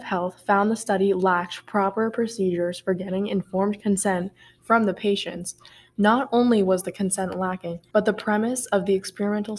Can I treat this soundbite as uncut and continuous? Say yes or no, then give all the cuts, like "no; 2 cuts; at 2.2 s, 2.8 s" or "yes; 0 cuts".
no; 1 cut; at 7.7 s